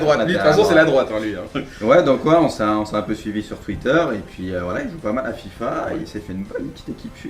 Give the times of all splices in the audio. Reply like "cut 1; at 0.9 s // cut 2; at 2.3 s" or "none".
cut 1; at 4.4 s